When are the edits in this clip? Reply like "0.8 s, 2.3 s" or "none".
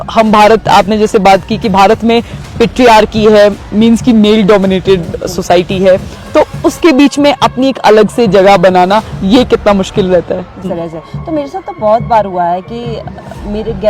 10.7 s